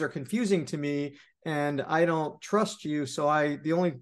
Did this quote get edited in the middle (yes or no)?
no